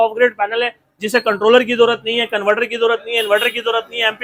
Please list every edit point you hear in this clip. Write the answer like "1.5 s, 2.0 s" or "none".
none